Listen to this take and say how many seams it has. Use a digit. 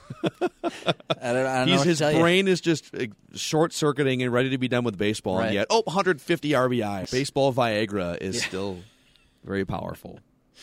1